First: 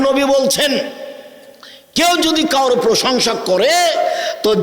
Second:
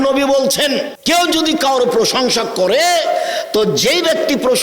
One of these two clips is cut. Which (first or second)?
second